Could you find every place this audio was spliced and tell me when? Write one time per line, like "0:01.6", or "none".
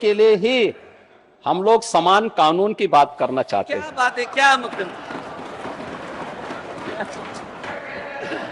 none